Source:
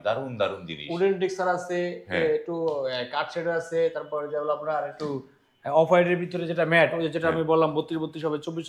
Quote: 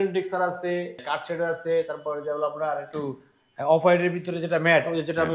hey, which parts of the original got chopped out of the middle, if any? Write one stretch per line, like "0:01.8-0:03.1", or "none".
0:02.0-0:03.0